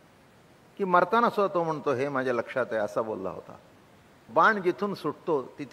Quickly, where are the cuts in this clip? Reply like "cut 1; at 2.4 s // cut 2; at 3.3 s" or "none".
cut 1; at 4.2 s

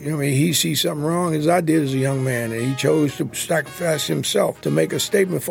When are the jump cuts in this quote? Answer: cut 1; at 3.3 s // cut 2; at 4.6 s

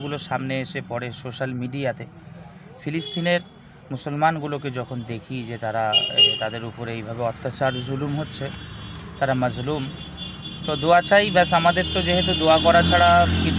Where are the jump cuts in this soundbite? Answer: none

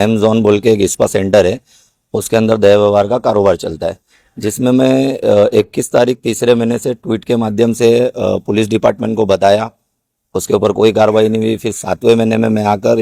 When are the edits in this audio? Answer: none

